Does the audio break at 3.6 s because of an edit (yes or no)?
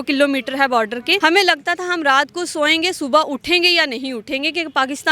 no